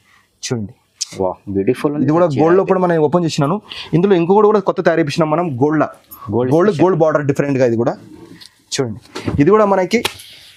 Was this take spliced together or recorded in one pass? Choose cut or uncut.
uncut